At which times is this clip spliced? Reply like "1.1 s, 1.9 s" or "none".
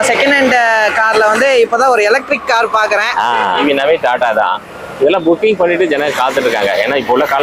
3.6 s